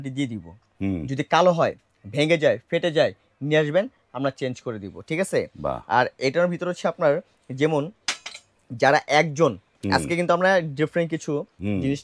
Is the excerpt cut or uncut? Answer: uncut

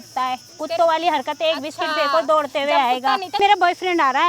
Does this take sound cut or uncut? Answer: cut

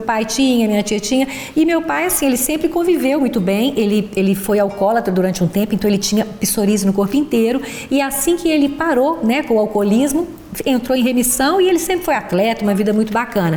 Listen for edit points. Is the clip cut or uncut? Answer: uncut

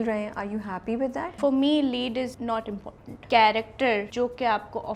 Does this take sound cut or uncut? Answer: cut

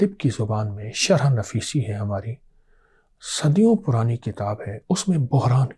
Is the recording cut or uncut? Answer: uncut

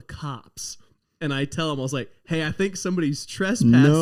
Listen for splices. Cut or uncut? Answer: uncut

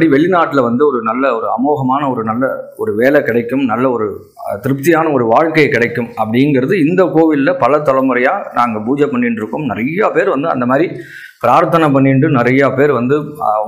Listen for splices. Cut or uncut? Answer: uncut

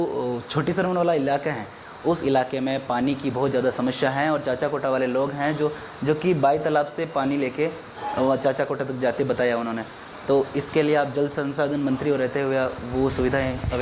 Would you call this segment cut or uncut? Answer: uncut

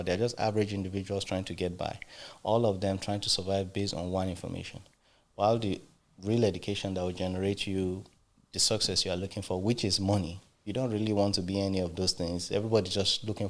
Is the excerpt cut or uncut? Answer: uncut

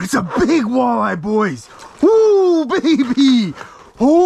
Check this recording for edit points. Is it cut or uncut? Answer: uncut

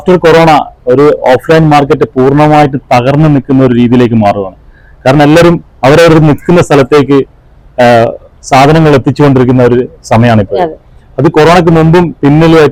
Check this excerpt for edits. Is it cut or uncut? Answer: uncut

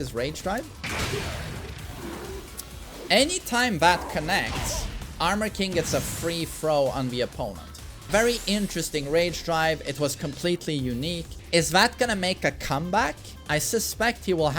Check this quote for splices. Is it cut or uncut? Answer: cut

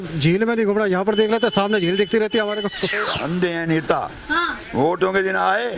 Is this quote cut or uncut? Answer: cut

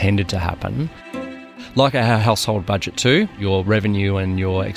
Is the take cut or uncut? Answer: cut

